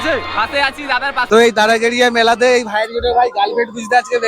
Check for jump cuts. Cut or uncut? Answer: cut